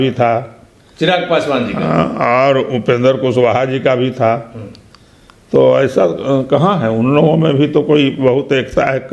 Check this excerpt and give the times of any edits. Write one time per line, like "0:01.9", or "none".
none